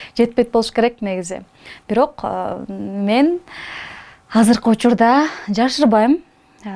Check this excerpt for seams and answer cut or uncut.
uncut